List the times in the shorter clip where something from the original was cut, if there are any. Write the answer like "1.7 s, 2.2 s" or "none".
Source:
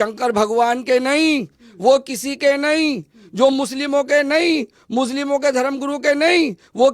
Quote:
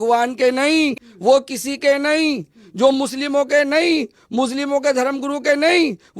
1.1 s